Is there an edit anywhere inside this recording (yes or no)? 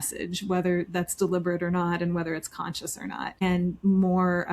yes